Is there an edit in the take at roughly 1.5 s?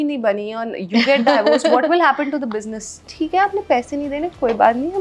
no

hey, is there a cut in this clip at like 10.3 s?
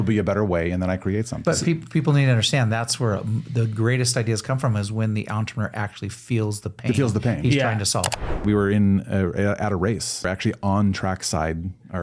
yes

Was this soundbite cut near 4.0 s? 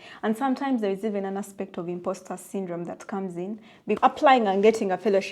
yes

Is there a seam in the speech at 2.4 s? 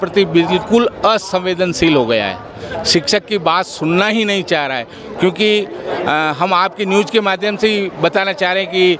no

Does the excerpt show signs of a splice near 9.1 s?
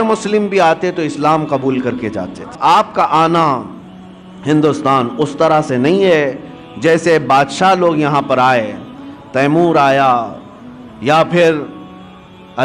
no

